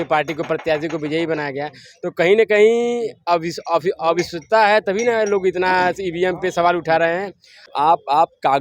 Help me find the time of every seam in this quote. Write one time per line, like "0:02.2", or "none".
0:07.6